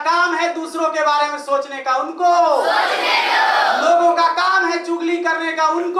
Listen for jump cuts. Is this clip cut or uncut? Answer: uncut